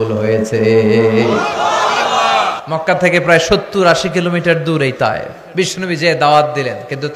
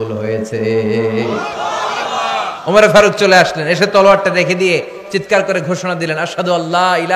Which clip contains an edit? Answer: first; 2 cuts; at 2.6 s, 5.4 s

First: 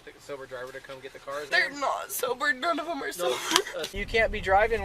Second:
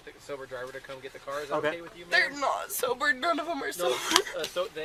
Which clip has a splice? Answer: first; 2 cuts; at 1.5 s, 3.9 s

